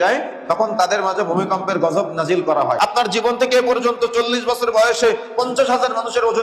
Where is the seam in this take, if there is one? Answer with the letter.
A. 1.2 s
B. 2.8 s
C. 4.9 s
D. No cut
B